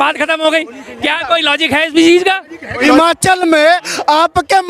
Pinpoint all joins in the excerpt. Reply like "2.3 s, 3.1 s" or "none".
2.8 s